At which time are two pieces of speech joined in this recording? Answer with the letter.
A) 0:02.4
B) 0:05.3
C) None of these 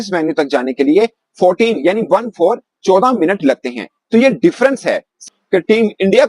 B